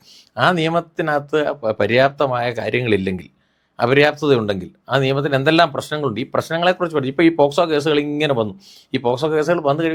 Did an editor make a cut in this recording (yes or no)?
no